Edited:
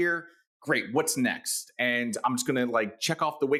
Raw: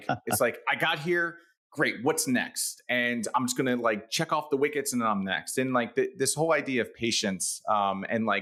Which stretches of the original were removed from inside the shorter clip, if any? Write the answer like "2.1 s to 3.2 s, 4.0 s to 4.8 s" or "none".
none